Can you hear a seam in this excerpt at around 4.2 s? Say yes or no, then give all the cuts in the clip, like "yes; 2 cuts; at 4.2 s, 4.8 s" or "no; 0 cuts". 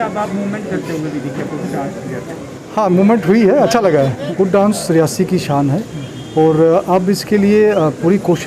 yes; 1 cut; at 4.2 s